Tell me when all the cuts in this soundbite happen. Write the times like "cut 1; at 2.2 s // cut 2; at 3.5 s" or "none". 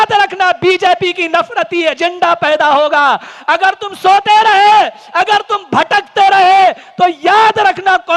none